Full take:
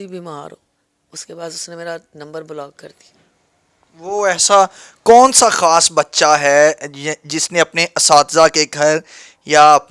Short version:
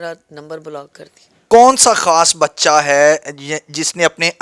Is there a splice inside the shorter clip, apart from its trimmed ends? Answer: yes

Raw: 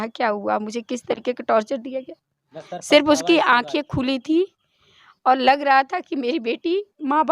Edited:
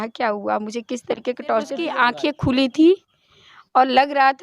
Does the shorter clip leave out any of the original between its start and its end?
yes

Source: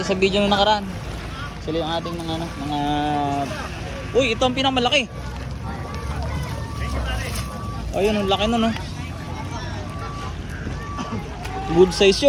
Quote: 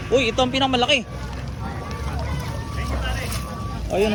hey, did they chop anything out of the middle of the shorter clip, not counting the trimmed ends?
no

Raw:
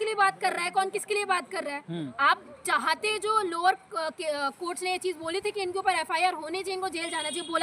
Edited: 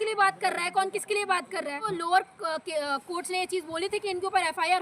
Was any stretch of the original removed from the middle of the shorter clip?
yes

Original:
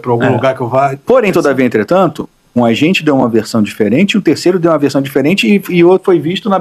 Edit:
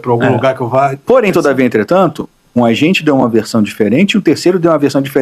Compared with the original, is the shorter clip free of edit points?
yes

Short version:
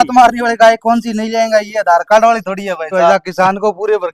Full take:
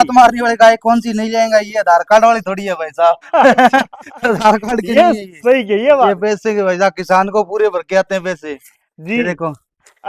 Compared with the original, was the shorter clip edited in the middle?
yes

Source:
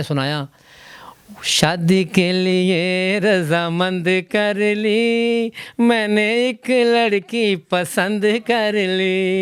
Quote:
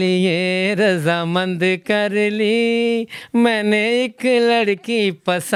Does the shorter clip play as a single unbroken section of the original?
yes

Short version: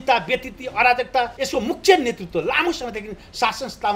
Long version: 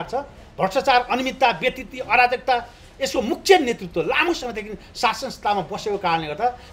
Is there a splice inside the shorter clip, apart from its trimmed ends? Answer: yes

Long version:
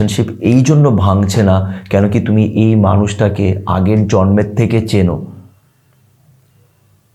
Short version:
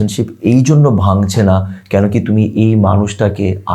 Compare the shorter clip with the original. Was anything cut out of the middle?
no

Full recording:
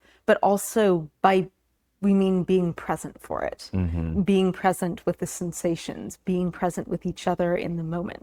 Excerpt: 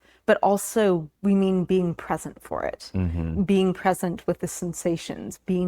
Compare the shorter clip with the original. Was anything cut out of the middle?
yes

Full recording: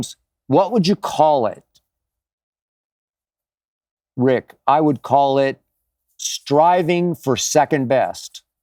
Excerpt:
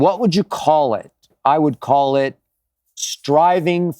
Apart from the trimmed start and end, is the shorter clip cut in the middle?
yes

